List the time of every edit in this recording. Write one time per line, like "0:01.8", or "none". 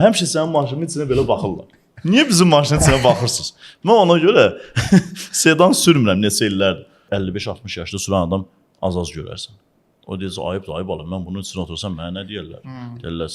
0:07.0